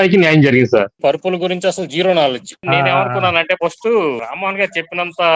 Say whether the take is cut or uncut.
cut